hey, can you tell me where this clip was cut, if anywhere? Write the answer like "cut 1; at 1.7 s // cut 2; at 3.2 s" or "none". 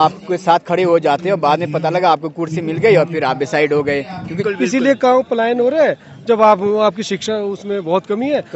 cut 1; at 4.4 s